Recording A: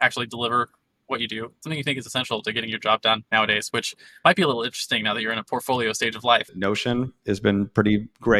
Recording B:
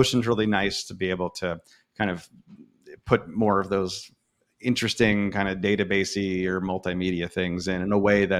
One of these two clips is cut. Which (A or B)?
A